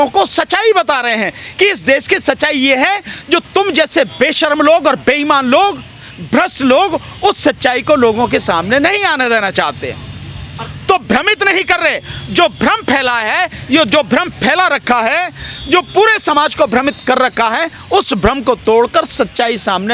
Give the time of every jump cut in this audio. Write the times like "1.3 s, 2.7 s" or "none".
none